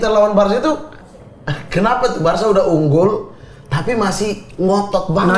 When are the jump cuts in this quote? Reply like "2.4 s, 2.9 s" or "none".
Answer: none